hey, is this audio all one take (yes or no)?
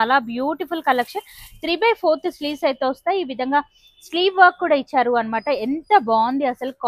yes